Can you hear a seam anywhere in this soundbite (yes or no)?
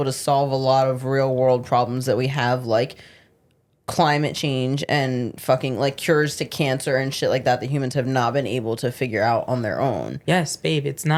no